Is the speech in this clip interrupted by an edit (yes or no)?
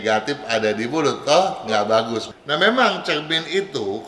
yes